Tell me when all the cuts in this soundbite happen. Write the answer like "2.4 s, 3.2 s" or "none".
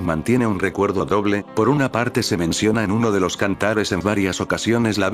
none